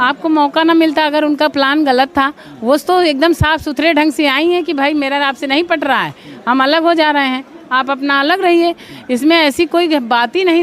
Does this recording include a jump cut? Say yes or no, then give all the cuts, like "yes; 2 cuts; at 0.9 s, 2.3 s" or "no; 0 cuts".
no; 0 cuts